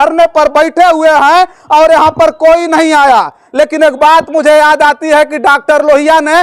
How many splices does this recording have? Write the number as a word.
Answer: one